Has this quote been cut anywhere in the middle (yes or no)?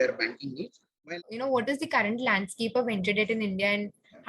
yes